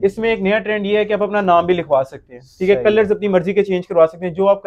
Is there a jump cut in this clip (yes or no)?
no